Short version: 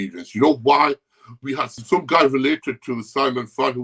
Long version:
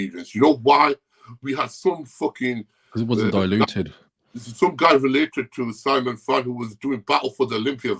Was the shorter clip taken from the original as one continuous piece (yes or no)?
no